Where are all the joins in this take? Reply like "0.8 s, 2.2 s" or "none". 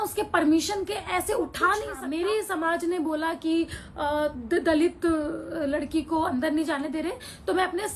2.0 s

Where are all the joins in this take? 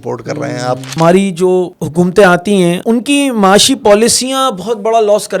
0.9 s, 1.8 s, 2.8 s

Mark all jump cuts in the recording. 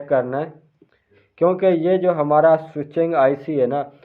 0.9 s

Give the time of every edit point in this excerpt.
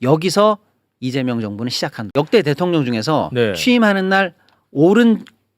1.9 s

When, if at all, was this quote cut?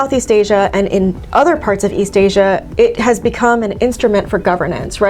none

